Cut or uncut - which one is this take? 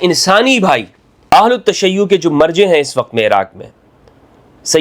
cut